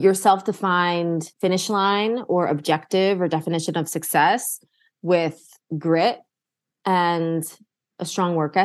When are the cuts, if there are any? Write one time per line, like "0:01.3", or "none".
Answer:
0:01.3